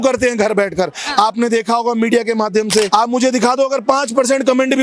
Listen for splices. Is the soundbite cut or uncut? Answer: cut